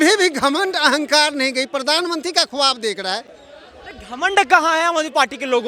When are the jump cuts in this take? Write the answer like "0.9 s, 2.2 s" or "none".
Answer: none